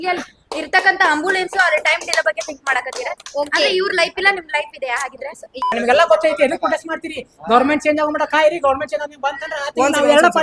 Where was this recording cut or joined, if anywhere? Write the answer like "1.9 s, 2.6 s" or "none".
5.8 s